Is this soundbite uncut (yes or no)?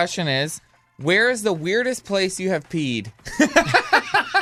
yes